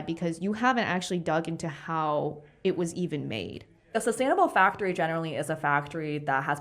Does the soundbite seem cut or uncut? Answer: cut